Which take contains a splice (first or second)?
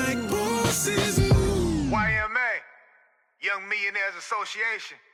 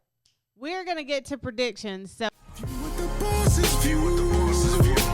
second